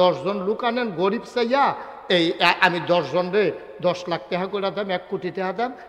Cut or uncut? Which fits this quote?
uncut